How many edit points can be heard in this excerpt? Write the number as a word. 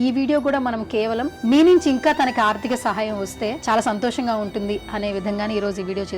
two